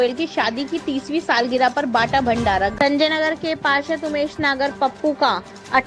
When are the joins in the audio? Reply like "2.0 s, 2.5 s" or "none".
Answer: 2.7 s